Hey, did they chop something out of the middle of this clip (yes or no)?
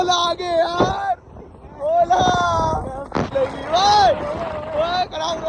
yes